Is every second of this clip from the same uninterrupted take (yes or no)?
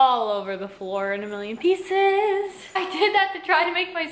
no